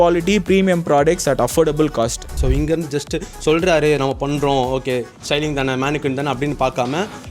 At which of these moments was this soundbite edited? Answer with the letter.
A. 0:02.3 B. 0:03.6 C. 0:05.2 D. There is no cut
A